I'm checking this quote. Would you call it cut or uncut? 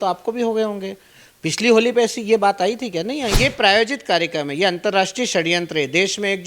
cut